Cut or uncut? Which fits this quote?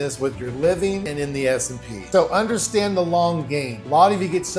cut